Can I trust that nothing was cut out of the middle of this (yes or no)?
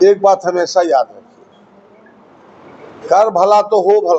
yes